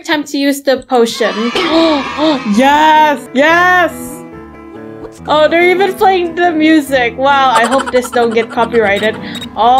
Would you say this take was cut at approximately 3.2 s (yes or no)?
no